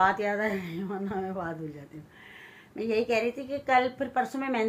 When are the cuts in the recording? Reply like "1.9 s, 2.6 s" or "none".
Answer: none